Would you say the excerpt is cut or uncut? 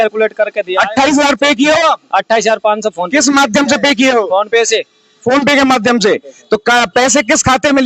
uncut